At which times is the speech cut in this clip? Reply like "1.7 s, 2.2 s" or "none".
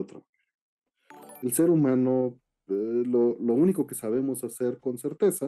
1.3 s